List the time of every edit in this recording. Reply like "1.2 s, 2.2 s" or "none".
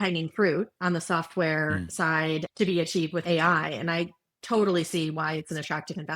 2.5 s, 3.2 s